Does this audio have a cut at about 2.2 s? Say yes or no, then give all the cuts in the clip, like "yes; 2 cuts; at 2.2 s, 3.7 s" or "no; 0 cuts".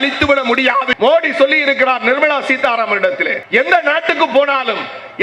no; 2 cuts; at 0.9 s, 3.4 s